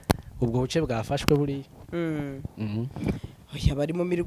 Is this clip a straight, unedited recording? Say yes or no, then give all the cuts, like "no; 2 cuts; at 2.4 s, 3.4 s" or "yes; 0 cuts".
yes; 0 cuts